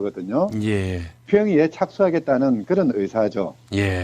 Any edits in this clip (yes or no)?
yes